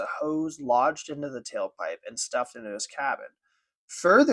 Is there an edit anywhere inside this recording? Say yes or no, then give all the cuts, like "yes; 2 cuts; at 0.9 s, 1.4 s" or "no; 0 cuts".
no; 0 cuts